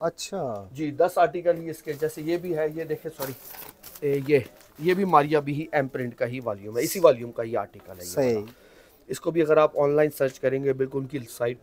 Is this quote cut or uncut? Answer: uncut